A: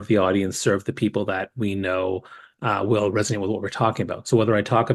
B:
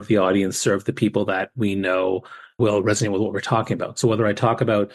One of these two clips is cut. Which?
B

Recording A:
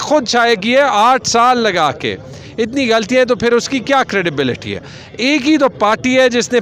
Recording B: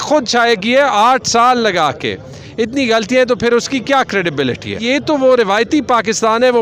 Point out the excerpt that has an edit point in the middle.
B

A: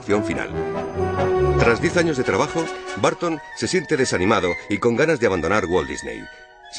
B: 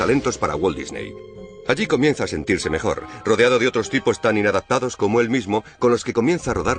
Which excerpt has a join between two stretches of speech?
B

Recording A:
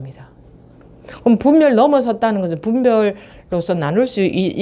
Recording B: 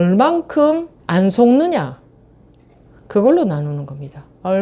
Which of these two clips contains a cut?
B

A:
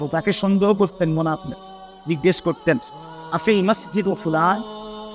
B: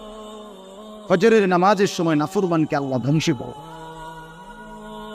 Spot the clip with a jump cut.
B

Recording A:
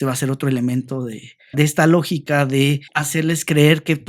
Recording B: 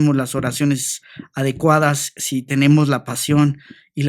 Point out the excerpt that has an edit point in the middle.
A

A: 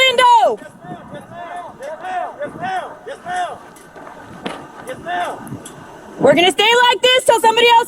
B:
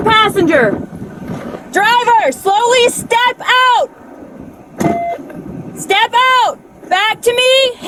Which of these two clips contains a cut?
A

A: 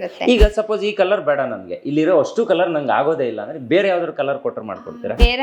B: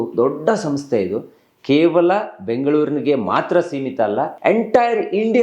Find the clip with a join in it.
B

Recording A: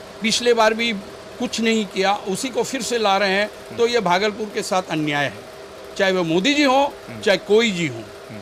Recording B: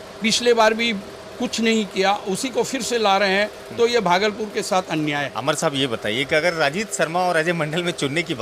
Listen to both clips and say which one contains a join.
B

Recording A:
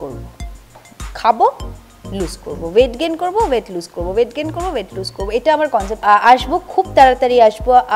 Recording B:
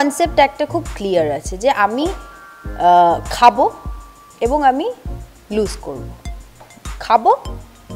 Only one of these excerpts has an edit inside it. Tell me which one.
A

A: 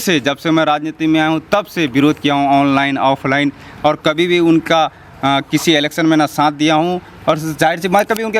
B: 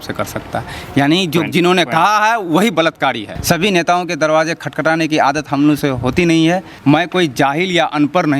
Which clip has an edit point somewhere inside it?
B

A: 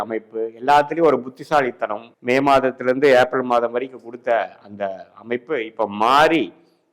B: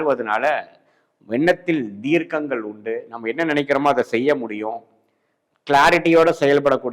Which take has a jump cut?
A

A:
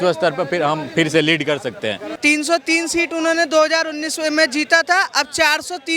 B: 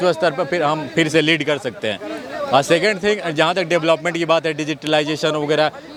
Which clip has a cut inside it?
A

